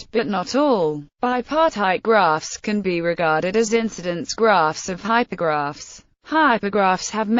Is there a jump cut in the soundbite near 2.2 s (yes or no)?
yes